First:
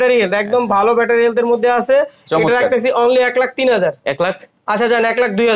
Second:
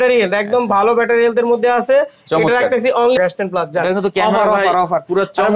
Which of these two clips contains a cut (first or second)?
second